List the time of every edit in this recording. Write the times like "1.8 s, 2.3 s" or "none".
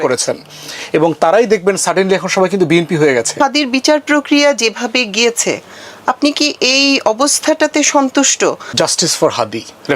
3.4 s, 8.7 s